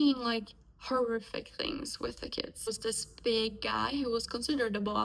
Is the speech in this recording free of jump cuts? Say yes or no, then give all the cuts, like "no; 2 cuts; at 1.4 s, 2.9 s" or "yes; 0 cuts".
no; 1 cut; at 2.7 s